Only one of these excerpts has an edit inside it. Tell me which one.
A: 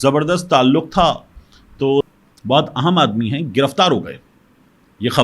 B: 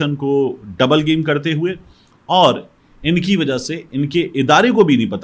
A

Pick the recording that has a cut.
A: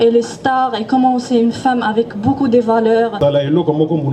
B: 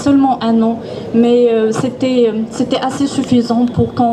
A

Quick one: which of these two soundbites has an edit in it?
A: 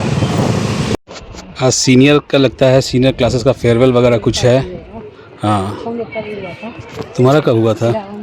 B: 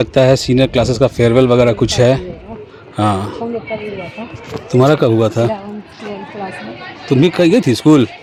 A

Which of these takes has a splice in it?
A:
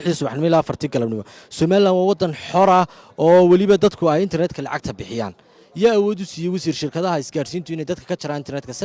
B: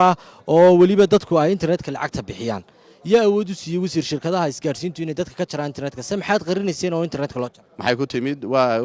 B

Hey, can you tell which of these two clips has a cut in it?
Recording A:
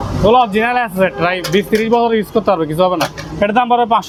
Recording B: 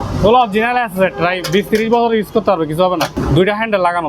B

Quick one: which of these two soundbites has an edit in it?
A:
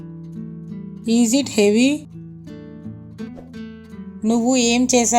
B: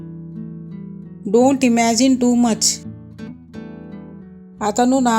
A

